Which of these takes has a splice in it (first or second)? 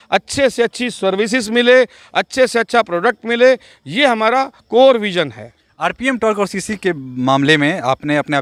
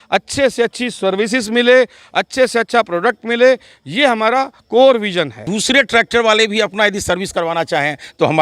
second